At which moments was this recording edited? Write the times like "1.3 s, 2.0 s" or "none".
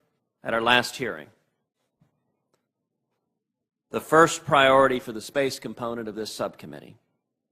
1.2 s